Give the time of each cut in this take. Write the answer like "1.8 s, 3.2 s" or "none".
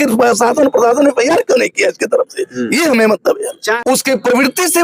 3.8 s